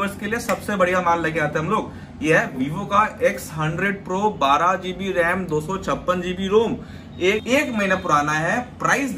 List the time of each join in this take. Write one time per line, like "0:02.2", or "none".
0:07.4